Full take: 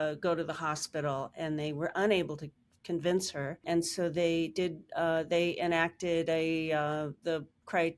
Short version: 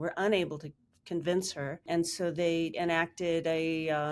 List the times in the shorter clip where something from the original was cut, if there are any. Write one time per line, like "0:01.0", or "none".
0:02.7